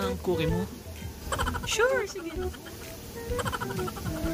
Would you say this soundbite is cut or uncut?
uncut